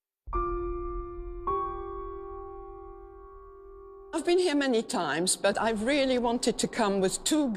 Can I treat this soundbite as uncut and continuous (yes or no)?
no